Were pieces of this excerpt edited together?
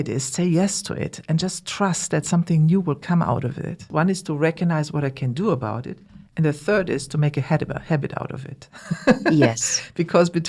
yes; 1 cut; at 3.8 s

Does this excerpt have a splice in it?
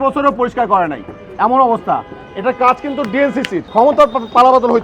yes; 1 cut; at 3.6 s

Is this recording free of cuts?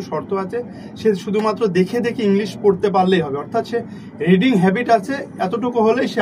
yes; 0 cuts

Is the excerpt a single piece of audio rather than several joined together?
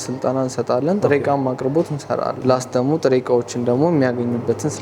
no; 1 cut; at 2.3 s

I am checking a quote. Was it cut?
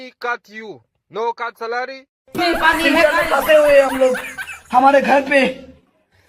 yes; 1 cut; at 2.0 s

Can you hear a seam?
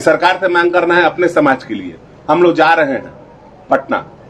no; 0 cuts

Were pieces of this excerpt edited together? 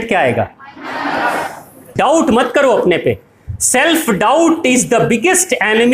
yes; 1 cut; at 1.9 s

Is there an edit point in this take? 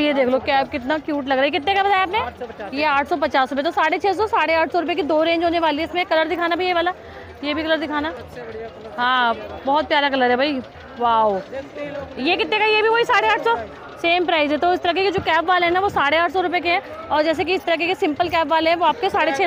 no; 0 cuts

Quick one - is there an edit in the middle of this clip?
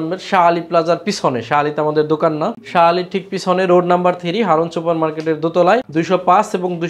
yes; 2 cuts; at 2.6 s, 5.9 s

